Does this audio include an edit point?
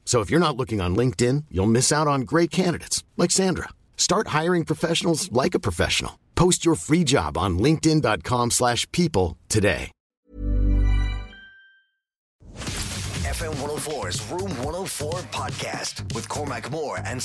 yes; 1 cut; at 12.5 s

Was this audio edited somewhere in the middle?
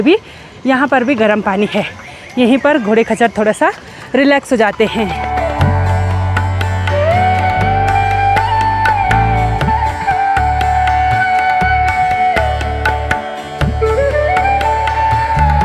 no; 0 cuts

